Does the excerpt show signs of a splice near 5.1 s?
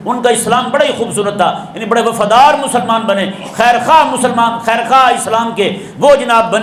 no; 0 cuts

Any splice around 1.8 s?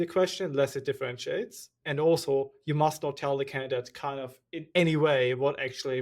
yes; 1 cut; at 1.8 s

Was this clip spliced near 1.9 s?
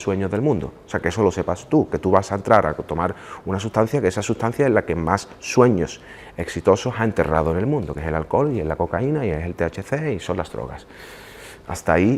no; 0 cuts

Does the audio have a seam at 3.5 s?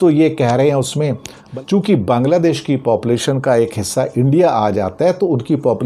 no; 1 cut; at 1.4 s

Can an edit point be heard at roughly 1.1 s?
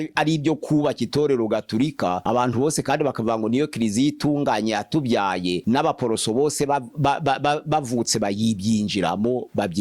no; 0 cuts

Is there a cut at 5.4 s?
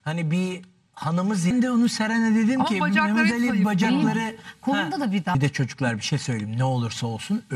yes; 2 cuts; at 1.5 s, 5.4 s

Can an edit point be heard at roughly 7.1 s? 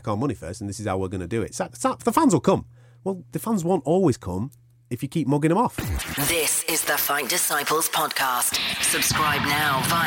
no; 1 cut; at 5.9 s

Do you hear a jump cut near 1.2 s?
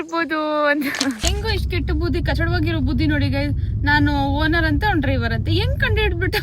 yes; 1 cut; at 1.2 s

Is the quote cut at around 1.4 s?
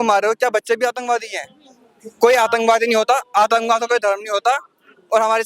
no; 0 cuts

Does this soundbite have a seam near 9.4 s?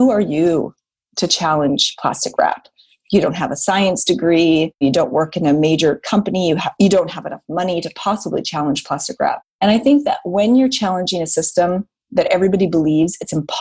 yes; 2 cuts; at 4.8 s, 9.4 s

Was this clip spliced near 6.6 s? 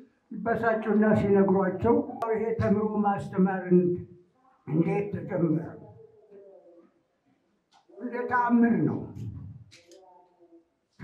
no; 1 cut; at 2.2 s

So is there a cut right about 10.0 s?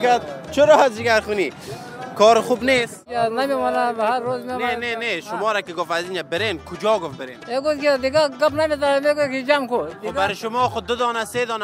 no; 1 cut; at 3.1 s

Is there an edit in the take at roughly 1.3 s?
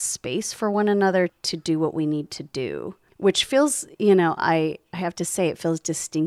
yes; 1 cut; at 1.3 s

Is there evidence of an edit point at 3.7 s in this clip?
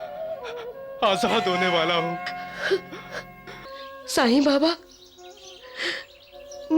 yes; 1 cut; at 3.7 s

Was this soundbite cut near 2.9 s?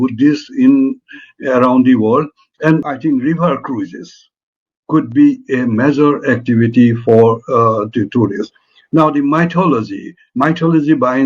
yes; 1 cut; at 2.9 s

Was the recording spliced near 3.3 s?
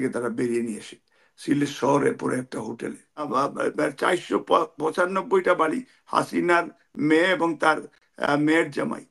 yes; 1 cut; at 3.3 s

